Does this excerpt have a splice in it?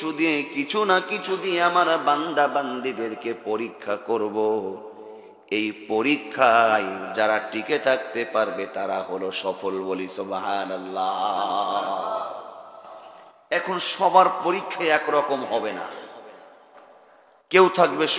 no; 0 cuts

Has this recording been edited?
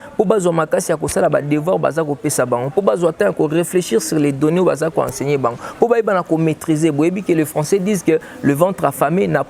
no; 0 cuts

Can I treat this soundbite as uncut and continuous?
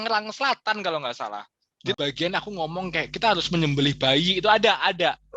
no; 1 cut; at 2.0 s

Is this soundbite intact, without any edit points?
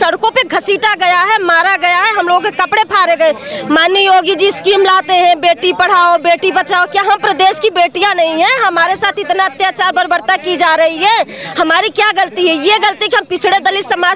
yes; 0 cuts

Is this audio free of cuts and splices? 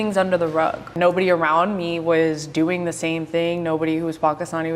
no; 1 cut; at 0.9 s

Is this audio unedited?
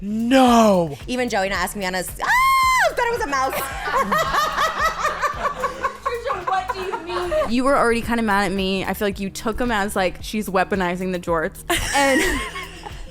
no; 3 cuts; at 1.0 s, 7.5 s, 10.2 s

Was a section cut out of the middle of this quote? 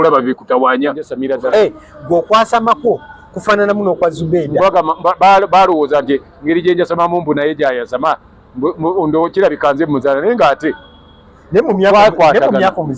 yes; 1 cut; at 1.1 s

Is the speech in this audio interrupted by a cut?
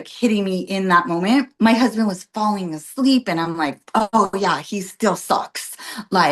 yes; 1 cut; at 1.5 s

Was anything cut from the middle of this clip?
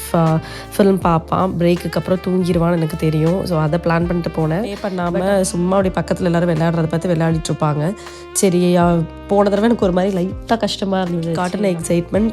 yes; 2 cuts; at 4.9 s, 11.3 s

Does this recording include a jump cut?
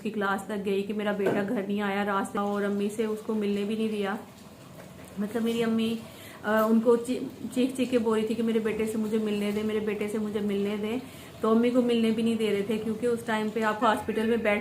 yes; 2 cuts; at 2.3 s, 13.8 s

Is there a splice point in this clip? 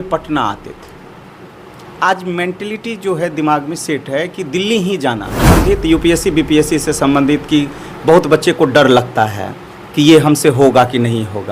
yes; 1 cut; at 5.6 s

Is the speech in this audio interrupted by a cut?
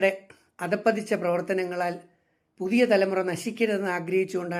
no; 0 cuts

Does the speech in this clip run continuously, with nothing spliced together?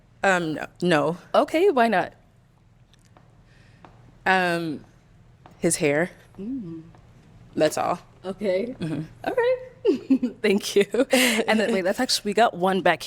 yes; 0 cuts

